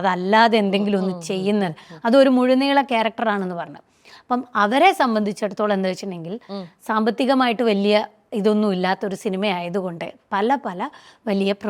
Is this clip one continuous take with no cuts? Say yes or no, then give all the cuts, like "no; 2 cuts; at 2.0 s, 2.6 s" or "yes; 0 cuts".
yes; 0 cuts